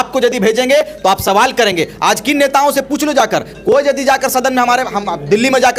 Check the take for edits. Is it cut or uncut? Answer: uncut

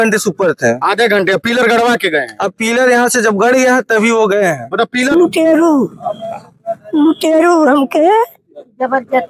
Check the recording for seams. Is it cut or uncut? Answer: cut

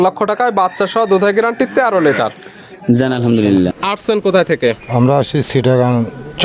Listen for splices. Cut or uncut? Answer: cut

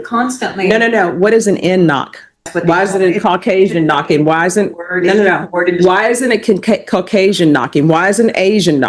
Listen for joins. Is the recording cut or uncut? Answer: cut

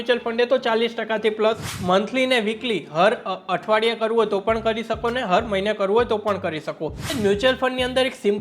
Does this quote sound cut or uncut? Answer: cut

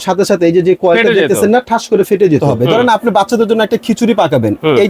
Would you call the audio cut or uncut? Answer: cut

